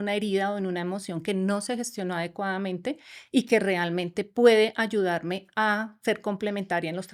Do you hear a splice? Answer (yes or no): no